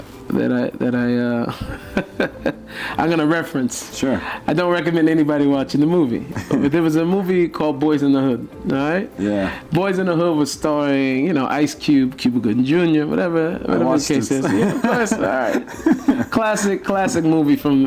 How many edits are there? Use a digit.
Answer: 0